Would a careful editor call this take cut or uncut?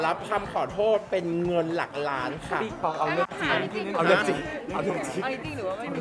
uncut